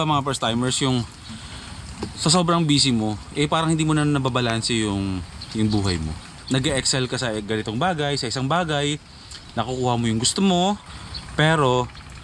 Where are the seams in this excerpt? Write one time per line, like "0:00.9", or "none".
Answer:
0:10.8